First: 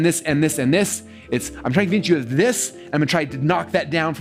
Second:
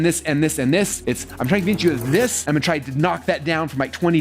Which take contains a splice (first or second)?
second